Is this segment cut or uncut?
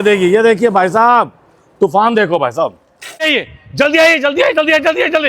cut